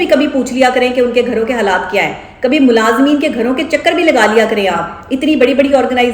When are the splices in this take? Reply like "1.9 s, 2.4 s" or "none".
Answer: none